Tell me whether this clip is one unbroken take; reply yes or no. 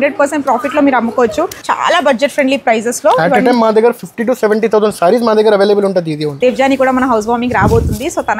no